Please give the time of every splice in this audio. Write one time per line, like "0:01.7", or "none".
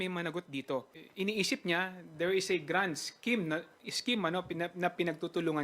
0:01.0